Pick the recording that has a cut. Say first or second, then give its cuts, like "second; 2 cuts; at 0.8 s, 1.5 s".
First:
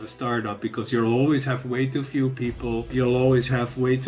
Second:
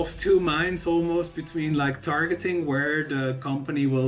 first; 1 cut; at 2.9 s